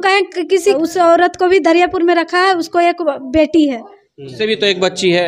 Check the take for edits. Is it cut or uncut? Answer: cut